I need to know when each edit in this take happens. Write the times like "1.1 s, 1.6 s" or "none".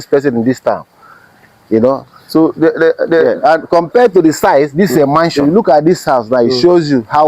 5.3 s